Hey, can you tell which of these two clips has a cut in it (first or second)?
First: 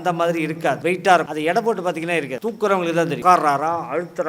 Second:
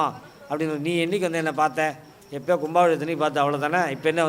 first